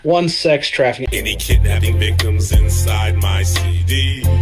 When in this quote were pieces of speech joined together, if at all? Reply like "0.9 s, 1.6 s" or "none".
1.0 s